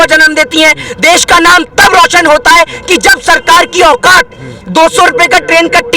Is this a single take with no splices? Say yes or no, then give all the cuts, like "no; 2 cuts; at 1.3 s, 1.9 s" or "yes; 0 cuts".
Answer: yes; 0 cuts